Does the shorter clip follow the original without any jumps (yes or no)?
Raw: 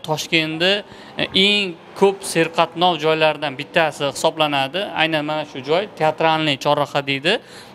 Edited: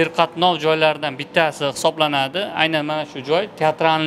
yes